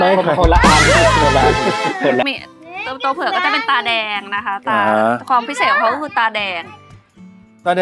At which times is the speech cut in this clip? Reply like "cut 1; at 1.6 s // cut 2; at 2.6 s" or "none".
cut 1; at 2.2 s